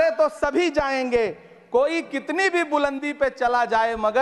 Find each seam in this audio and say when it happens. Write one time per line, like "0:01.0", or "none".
none